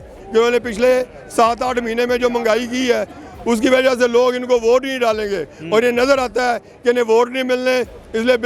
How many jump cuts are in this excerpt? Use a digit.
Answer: 0